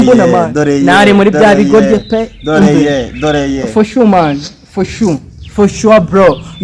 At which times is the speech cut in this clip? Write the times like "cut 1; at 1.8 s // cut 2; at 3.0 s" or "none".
none